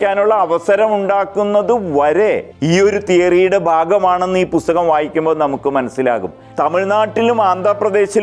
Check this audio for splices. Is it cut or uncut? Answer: cut